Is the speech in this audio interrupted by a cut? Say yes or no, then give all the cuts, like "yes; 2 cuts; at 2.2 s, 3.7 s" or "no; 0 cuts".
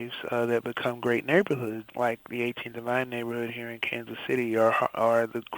yes; 1 cut; at 1.9 s